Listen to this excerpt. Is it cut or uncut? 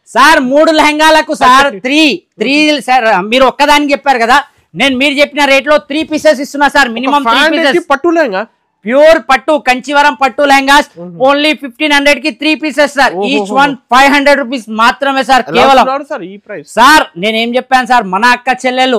uncut